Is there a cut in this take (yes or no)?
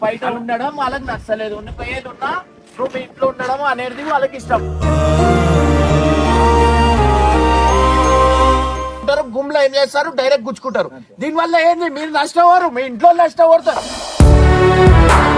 yes